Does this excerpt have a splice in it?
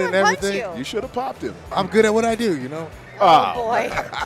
yes; 1 cut; at 1.7 s

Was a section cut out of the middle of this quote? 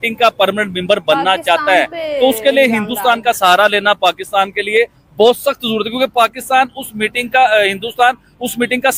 no; 0 cuts

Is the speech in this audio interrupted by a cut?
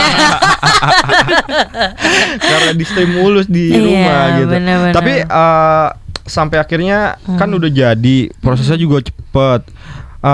no; 0 cuts

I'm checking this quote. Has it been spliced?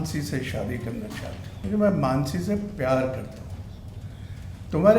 yes; 1 cut; at 1.5 s

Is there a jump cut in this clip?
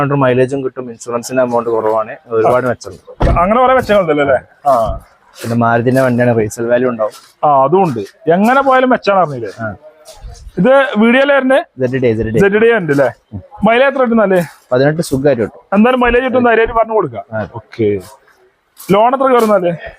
no; 0 cuts

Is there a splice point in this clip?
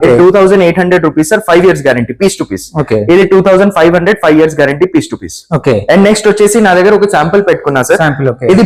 no; 0 cuts

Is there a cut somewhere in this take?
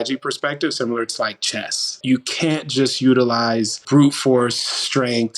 yes; 2 cuts; at 1.9 s, 3.8 s

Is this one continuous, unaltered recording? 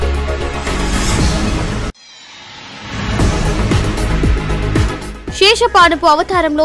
yes; 0 cuts

